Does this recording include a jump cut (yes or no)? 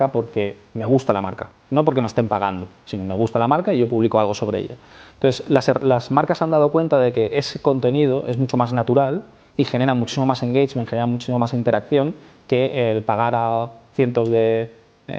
no